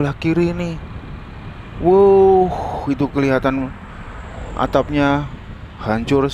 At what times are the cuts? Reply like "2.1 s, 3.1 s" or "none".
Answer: none